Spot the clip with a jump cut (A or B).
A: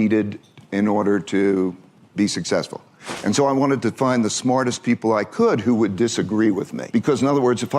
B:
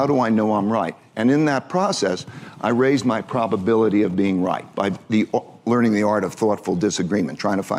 A